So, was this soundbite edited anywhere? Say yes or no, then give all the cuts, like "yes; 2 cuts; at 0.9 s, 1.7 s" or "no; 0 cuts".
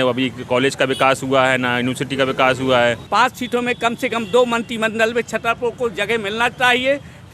yes; 1 cut; at 3.0 s